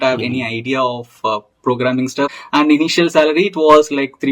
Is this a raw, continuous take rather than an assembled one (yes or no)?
no